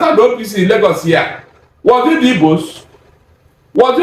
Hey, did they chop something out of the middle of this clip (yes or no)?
no